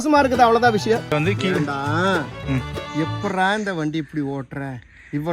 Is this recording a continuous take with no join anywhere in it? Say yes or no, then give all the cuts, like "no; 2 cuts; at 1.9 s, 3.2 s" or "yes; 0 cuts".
no; 1 cut; at 1.1 s